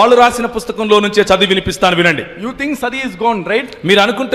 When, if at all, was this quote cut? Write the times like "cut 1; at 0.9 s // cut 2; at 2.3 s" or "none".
none